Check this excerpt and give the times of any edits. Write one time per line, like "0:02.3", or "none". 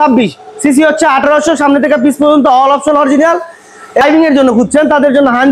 0:04.0